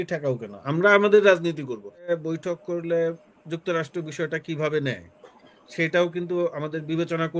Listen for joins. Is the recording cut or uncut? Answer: cut